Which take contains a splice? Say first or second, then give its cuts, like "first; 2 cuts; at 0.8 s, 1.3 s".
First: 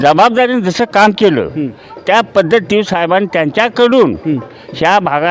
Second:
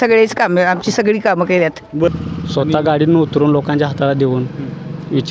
second; 1 cut; at 2.1 s